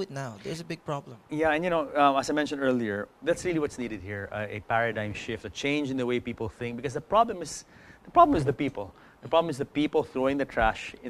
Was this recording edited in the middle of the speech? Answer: no; 0 cuts

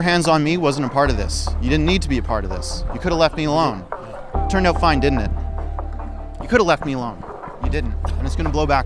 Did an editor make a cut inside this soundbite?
no; 0 cuts

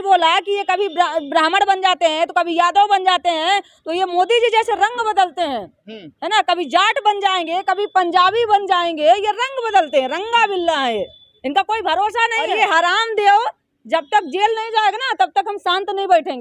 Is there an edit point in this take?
yes; 1 cut; at 12.5 s

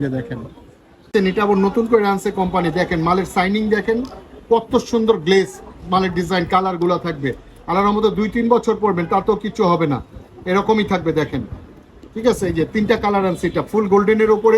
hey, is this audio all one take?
no; 1 cut; at 1.1 s

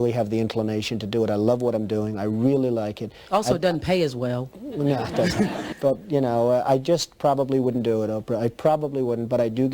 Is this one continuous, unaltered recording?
no; 1 cut; at 5.7 s

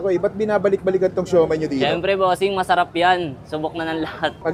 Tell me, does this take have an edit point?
no; 0 cuts

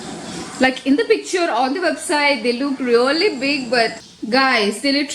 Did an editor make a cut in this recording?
yes; 1 cut; at 4.0 s

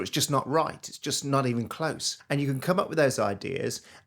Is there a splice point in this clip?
yes; 1 cut; at 2.1 s

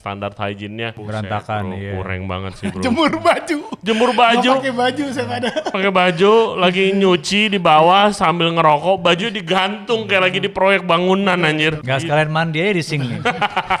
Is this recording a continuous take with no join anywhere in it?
no; 3 cuts; at 1.0 s, 5.7 s, 11.8 s

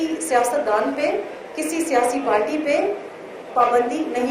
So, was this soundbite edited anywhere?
no; 0 cuts

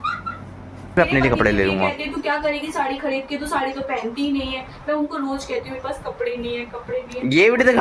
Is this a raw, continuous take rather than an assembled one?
no; 1 cut; at 1.0 s

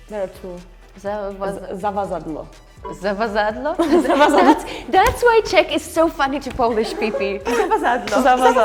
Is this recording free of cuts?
yes; 0 cuts

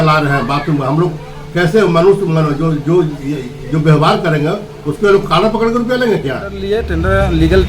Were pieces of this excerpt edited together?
yes; 1 cut; at 6.7 s

